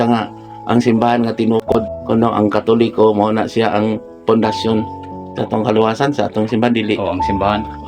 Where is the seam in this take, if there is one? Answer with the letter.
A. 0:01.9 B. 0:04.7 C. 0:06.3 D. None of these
A